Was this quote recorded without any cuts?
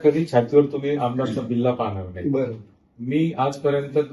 yes; 0 cuts

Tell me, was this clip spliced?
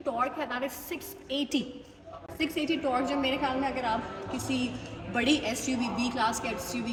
no; 0 cuts

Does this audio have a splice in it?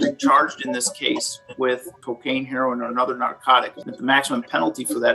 yes; 2 cuts; at 2.0 s, 3.8 s

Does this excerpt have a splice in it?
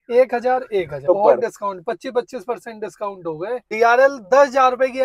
yes; 2 cuts; at 1.0 s, 3.7 s

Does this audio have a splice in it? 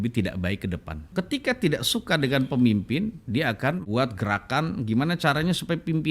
yes; 2 cuts; at 1.0 s, 3.8 s

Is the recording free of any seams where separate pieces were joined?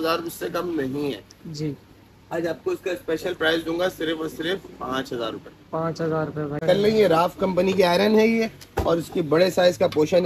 no; 1 cut; at 6.6 s

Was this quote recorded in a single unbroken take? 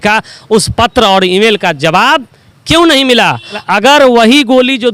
no; 1 cut; at 3.6 s

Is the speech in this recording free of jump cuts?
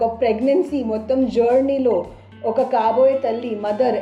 yes; 0 cuts

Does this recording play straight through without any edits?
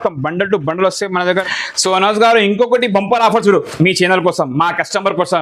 no; 1 cut; at 1.2 s

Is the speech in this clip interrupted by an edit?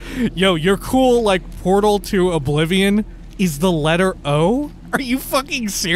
yes; 2 cuts; at 3.2 s, 4.8 s

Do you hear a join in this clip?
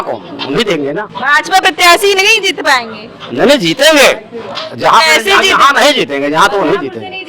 no; 0 cuts

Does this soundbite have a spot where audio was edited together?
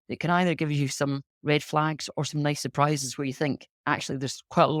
no; 0 cuts

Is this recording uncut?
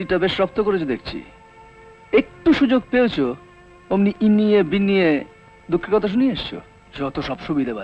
yes; 0 cuts

